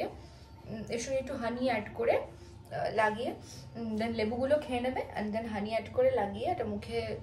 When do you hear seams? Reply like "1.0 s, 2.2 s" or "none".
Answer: none